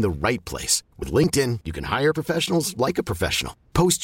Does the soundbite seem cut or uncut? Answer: uncut